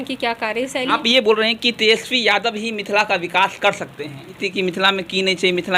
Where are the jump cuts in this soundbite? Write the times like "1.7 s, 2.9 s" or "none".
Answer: 0.9 s, 4.4 s